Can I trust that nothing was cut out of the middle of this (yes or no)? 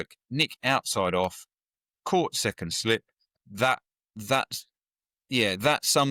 yes